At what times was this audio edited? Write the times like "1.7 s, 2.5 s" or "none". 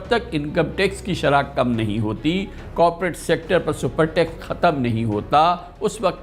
none

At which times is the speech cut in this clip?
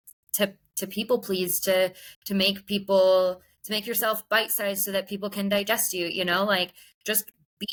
none

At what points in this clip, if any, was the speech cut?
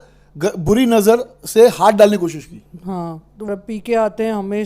3.5 s

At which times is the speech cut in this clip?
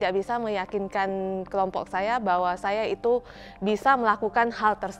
none

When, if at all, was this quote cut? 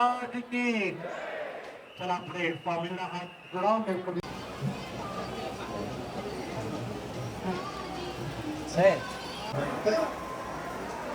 4.2 s, 9.6 s

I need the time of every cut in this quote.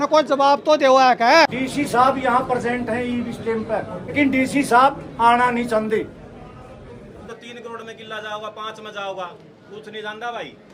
1.5 s, 4.1 s, 7.3 s

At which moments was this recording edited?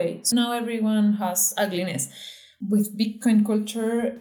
2.5 s

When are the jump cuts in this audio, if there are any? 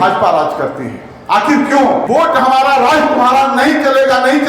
2.0 s

